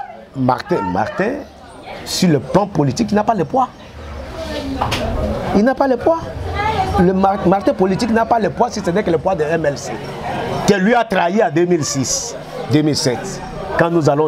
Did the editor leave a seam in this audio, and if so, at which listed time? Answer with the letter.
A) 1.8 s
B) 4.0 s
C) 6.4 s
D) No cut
D